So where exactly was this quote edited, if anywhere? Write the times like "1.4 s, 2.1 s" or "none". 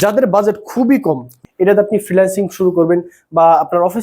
1.3 s